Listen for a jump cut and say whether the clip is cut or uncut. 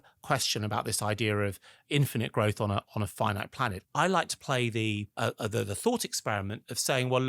cut